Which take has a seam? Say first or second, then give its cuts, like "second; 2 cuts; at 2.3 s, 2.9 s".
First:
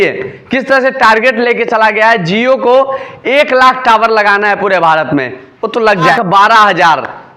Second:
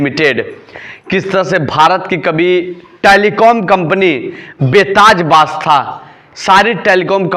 first; 1 cut; at 6.1 s